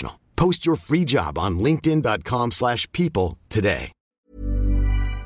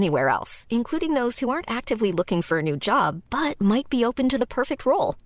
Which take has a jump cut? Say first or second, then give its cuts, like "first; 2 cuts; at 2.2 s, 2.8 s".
first; 1 cut; at 4.1 s